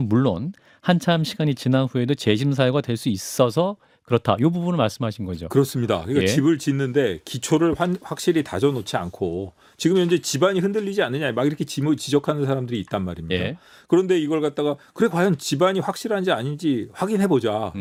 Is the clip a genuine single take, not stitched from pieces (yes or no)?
yes